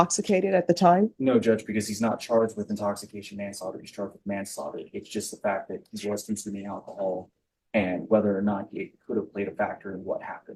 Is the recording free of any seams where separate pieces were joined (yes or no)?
yes